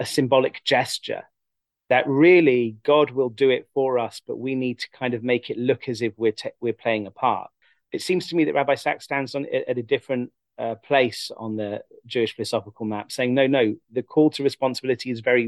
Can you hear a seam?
yes; 1 cut; at 7.5 s

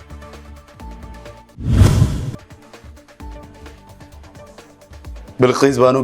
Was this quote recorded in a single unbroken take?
yes; 0 cuts

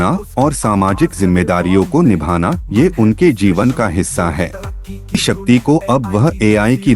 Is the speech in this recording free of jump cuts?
no; 1 cut; at 5.1 s

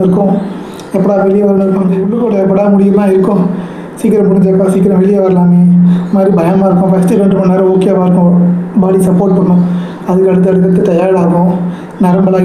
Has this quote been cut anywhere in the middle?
yes; 1 cut; at 2.0 s

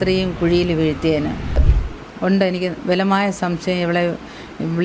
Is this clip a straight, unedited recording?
no; 1 cut; at 1.7 s

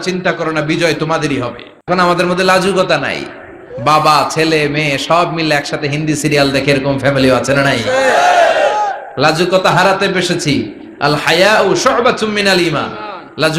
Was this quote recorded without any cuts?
no; 1 cut; at 1.9 s

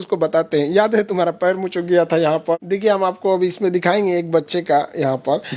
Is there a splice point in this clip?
yes; 1 cut; at 2.6 s

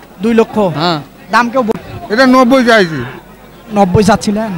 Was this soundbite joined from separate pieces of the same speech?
yes; 1 cut; at 1.7 s

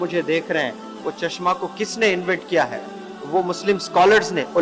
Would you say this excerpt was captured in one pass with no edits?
yes; 0 cuts

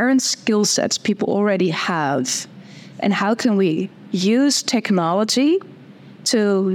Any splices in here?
no; 0 cuts

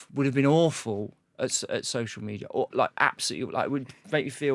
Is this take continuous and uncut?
yes; 0 cuts

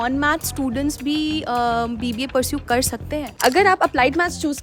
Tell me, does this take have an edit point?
yes; 1 cut; at 3.2 s

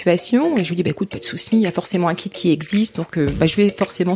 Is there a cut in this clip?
no; 0 cuts

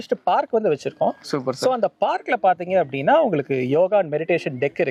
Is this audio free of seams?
yes; 0 cuts

